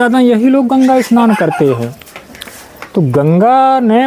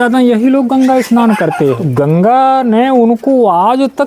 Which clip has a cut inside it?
second; 1 cut; at 1.8 s

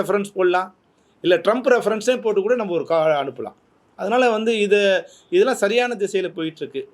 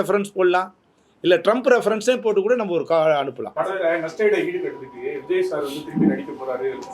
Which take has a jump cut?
second; 1 cut; at 3.4 s

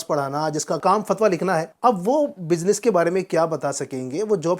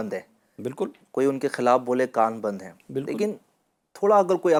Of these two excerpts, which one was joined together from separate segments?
first; 2 cuts; at 0.8 s, 1.7 s

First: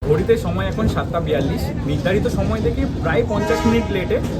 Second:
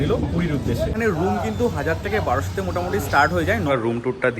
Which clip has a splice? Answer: second; 2 cuts; at 0.9 s, 3.7 s

